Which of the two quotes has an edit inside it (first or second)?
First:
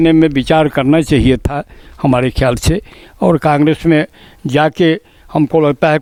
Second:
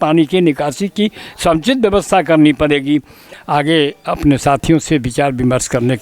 second